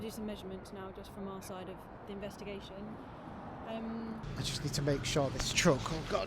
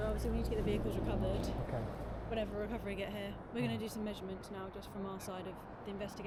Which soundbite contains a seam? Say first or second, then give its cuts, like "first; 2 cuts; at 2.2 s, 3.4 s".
first; 1 cut; at 4.2 s